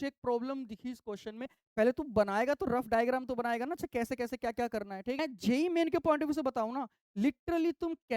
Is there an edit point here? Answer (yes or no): yes